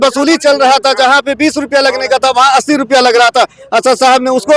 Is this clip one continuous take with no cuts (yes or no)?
yes